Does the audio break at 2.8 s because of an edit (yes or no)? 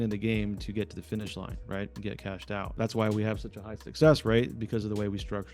yes